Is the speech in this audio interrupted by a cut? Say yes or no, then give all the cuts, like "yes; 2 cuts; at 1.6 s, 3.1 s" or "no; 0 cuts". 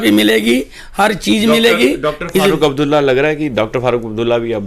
no; 0 cuts